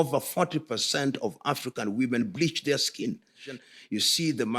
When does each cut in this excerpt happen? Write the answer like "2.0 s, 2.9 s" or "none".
3.5 s